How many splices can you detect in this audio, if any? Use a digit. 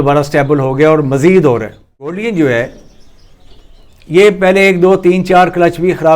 1